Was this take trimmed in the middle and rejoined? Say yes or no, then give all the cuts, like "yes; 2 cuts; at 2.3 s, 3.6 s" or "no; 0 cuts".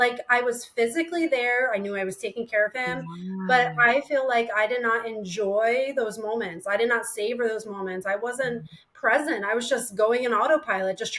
no; 0 cuts